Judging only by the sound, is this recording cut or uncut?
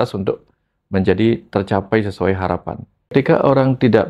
cut